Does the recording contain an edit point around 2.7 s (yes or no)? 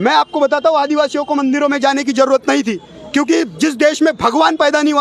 no